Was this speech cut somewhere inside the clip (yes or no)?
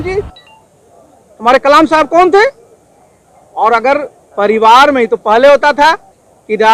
no